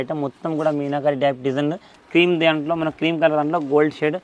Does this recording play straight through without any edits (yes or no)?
no